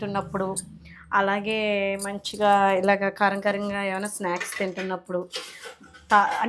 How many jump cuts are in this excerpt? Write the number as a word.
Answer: zero